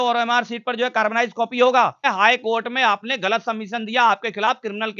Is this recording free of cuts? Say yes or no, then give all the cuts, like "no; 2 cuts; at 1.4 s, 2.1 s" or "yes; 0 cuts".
no; 1 cut; at 2.0 s